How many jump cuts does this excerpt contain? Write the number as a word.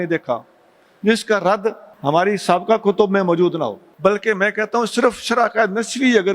two